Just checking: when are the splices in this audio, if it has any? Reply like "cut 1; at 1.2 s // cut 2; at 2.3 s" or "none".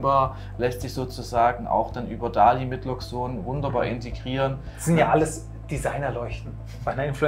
none